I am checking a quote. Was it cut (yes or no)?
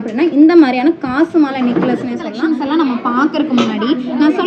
yes